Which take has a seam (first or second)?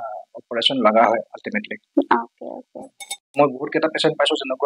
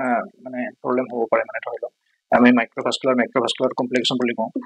first